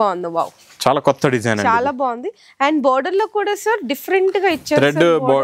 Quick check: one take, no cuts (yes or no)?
yes